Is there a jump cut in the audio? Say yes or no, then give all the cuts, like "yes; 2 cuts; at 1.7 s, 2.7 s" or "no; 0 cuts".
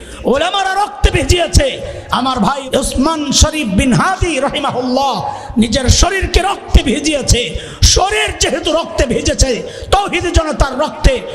yes; 1 cut; at 2.6 s